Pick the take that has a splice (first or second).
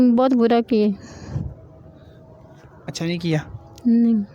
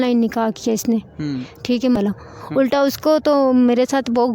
second